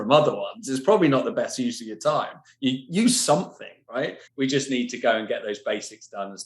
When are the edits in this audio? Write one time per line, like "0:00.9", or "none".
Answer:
0:04.2